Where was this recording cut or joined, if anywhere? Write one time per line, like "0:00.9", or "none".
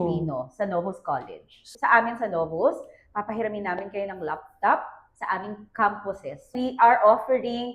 0:01.7
0:06.5